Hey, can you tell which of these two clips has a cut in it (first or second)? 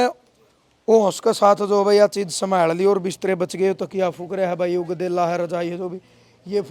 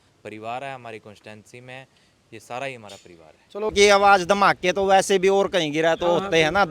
second